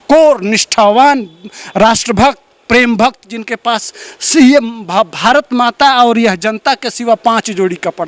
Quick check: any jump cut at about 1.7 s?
no; 0 cuts

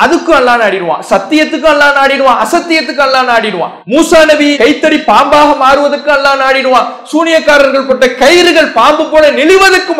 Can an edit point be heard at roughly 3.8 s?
yes; 1 cut; at 3.8 s

